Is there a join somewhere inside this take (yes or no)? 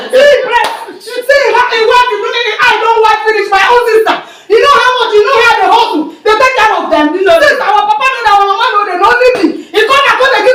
no